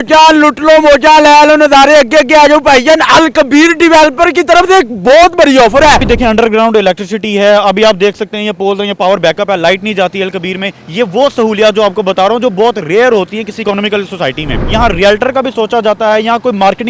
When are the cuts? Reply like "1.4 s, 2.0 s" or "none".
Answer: 6.0 s, 14.6 s